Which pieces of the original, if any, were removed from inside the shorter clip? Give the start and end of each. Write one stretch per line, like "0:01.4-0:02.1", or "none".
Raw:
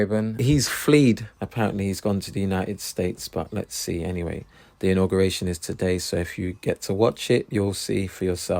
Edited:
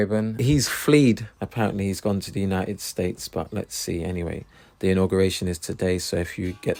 none